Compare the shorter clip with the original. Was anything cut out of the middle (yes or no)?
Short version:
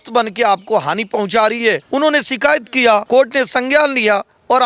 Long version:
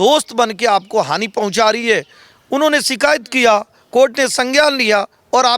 yes